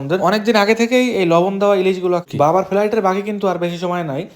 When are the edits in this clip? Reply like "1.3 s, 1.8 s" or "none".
2.3 s